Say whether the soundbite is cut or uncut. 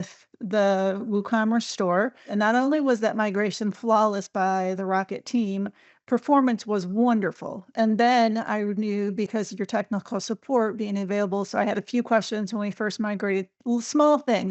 cut